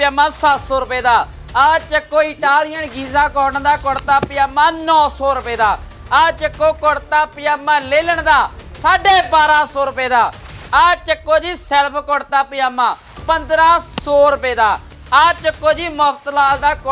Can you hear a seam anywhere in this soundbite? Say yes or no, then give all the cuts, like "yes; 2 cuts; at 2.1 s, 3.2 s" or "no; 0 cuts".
no; 0 cuts